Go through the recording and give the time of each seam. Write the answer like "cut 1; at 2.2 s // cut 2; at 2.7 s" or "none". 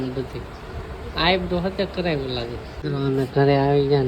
cut 1; at 2.9 s